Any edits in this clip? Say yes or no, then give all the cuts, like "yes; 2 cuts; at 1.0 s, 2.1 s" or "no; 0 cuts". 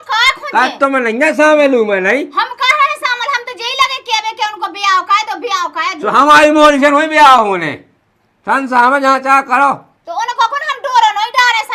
no; 0 cuts